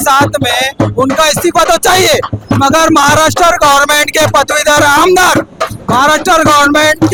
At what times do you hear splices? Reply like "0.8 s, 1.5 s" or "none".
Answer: none